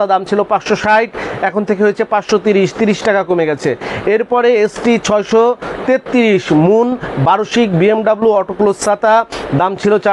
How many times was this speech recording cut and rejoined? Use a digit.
0